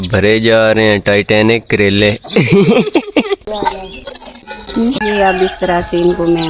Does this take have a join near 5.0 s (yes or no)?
yes